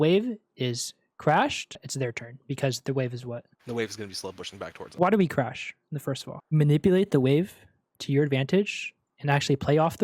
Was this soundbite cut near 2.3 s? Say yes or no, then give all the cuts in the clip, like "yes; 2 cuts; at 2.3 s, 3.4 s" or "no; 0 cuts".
no; 2 cuts; at 4.9 s, 6.4 s